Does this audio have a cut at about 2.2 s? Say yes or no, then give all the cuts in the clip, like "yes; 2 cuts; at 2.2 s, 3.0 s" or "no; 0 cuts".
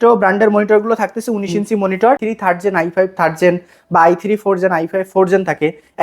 yes; 1 cut; at 2.2 s